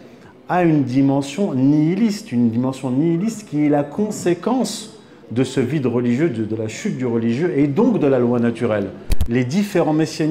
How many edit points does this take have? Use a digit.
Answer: 1